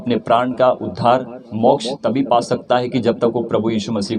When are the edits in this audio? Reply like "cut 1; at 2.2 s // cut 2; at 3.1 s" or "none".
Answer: none